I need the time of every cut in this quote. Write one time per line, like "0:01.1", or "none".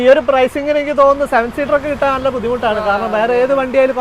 none